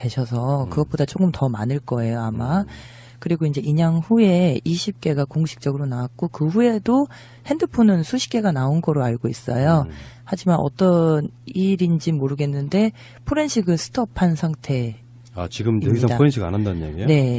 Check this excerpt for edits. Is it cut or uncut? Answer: cut